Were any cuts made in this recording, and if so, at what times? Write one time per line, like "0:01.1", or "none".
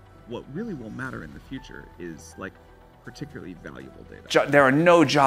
0:04.3